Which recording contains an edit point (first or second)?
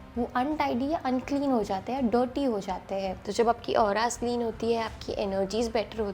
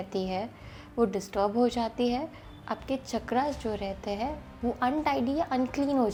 first